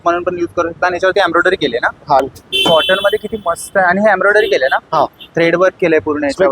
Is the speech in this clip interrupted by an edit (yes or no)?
yes